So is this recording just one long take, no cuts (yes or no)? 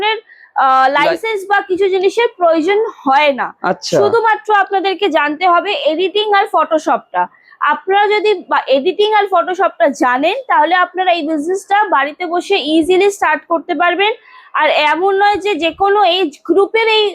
yes